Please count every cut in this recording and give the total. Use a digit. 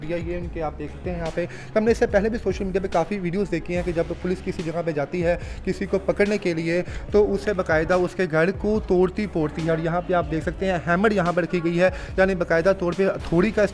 0